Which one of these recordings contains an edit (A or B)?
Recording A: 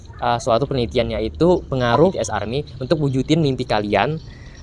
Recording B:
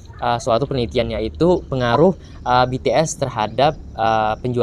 A